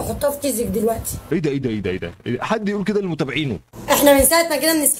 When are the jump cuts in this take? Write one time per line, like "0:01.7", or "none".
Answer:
0:03.6